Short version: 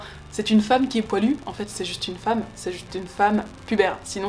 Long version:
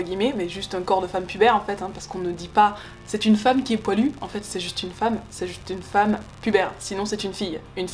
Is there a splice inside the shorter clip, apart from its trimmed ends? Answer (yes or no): no